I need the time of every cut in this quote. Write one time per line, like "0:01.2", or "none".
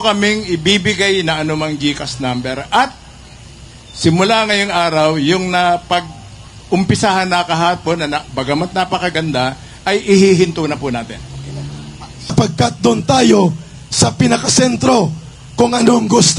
0:12.3